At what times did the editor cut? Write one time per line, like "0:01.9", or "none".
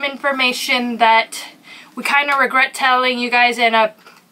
none